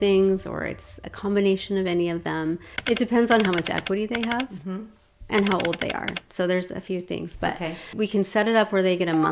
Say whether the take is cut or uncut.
cut